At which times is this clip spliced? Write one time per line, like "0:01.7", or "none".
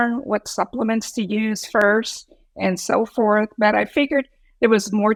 none